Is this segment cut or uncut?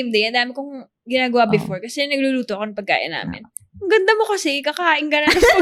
uncut